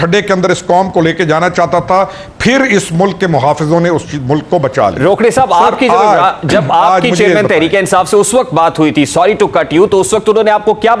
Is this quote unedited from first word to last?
yes; 0 cuts

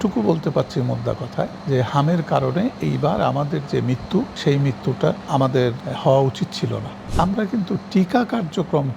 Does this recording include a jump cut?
yes; 4 cuts; at 1.6 s, 4.3 s, 5.6 s, 7.0 s

